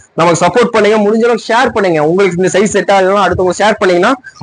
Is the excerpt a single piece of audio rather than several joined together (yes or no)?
yes